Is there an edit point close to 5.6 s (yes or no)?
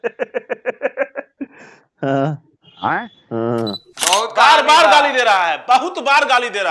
no